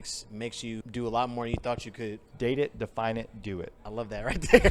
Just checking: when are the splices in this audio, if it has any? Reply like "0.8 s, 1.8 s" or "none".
0.9 s, 2.2 s, 3.8 s